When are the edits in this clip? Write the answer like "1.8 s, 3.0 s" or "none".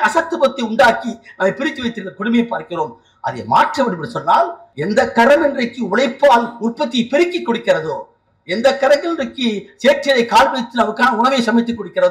4.7 s